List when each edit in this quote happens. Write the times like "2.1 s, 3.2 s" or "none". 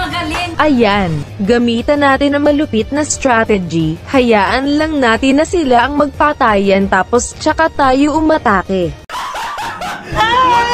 1.2 s